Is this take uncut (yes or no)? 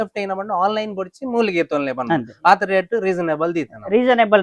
yes